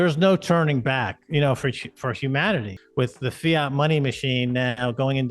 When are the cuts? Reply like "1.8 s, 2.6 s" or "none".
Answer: 2.8 s